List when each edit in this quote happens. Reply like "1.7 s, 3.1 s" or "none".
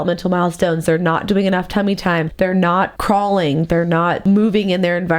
2.7 s, 4.2 s